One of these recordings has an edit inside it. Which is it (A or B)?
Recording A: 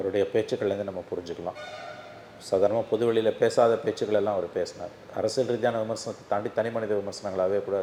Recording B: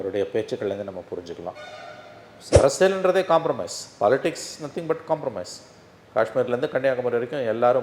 B